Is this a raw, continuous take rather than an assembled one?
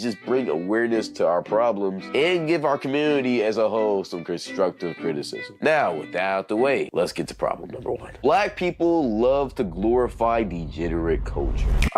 no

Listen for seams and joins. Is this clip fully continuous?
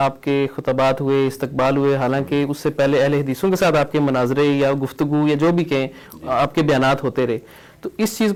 yes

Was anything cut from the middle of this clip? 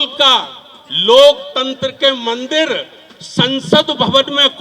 no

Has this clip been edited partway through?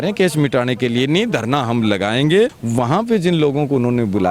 yes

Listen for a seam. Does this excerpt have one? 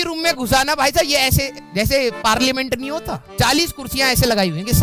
no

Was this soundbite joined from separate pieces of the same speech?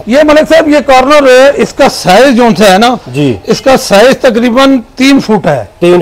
no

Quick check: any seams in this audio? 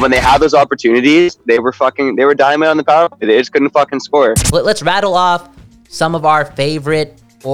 yes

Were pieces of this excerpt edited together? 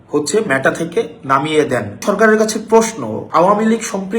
yes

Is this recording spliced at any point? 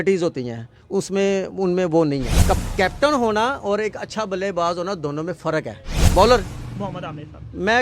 yes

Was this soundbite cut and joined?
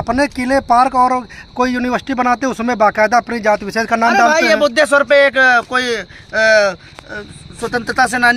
no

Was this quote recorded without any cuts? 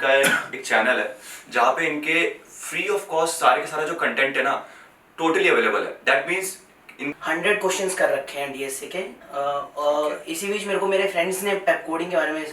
no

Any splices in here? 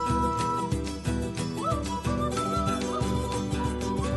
no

